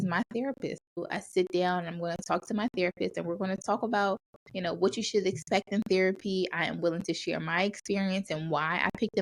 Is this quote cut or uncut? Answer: cut